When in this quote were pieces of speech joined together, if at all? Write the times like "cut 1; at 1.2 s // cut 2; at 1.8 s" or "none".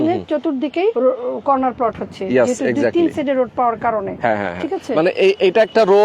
cut 1; at 0.9 s